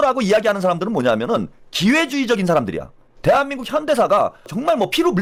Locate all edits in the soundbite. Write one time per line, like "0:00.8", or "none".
none